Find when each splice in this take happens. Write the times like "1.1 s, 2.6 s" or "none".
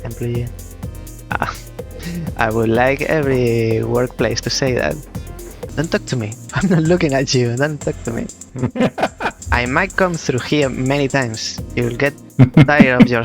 5.6 s, 6.4 s, 8.4 s, 9.4 s